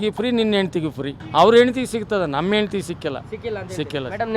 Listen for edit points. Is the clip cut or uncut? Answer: cut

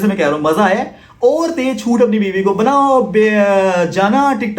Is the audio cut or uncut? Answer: uncut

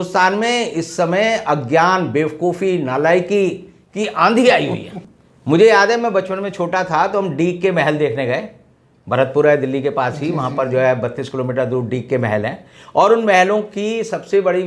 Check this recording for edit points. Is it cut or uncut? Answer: uncut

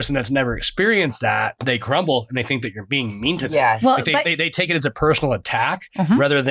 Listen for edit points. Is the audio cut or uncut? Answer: uncut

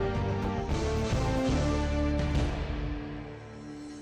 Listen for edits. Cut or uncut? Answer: uncut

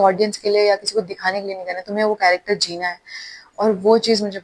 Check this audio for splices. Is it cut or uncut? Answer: uncut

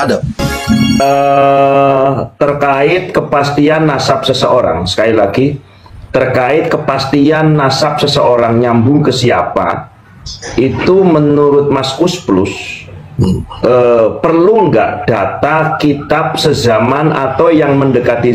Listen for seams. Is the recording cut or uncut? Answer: cut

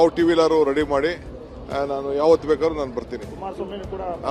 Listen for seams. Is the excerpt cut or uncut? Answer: uncut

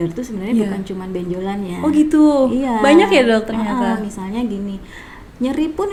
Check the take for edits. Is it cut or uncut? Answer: uncut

